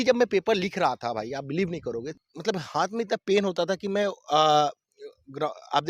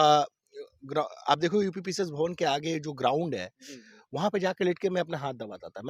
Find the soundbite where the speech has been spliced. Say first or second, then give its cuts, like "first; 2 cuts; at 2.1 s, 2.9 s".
first; 1 cut; at 2.1 s